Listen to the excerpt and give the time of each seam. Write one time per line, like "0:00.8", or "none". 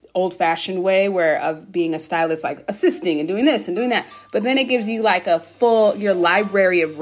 none